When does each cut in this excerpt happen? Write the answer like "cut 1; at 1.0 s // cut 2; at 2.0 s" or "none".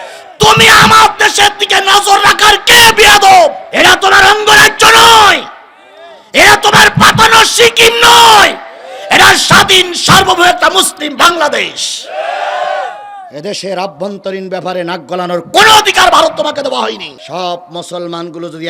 cut 1; at 3.6 s // cut 2; at 17.2 s